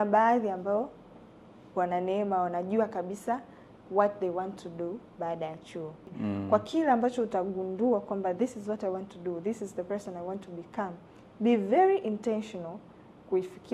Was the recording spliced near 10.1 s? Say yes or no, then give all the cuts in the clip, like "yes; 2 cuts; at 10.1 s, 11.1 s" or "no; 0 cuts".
no; 1 cut; at 6.1 s